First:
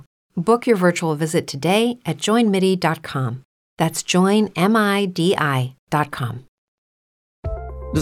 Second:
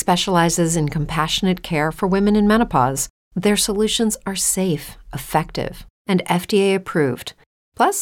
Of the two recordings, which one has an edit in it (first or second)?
first